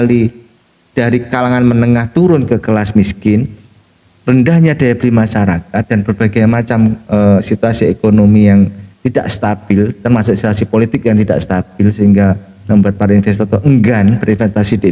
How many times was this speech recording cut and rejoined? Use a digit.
0